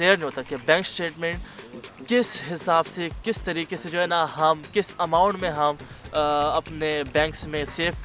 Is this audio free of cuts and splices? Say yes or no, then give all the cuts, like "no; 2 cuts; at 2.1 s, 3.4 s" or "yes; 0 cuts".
yes; 0 cuts